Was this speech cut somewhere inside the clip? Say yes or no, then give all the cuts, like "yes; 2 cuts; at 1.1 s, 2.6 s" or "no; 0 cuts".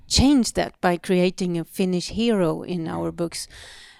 no; 0 cuts